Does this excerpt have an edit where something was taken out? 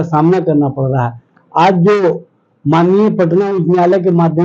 no; 0 cuts

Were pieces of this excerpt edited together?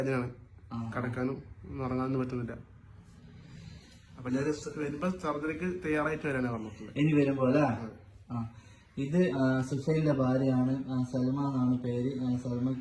no; 0 cuts

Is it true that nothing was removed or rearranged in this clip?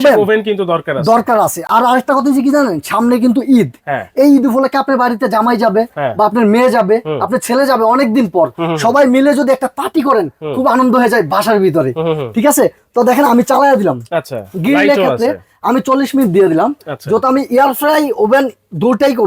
yes; 0 cuts

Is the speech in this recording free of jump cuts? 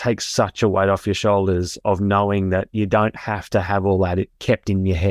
yes; 0 cuts

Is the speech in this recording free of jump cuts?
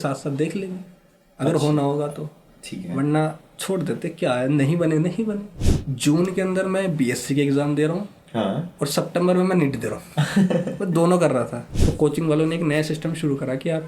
no; 2 cuts; at 5.6 s, 11.6 s

